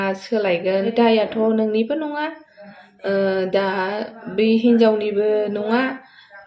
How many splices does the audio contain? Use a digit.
1